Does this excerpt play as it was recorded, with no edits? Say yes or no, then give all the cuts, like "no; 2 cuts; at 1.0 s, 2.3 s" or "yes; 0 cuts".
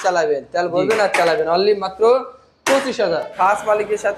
no; 1 cut; at 3.3 s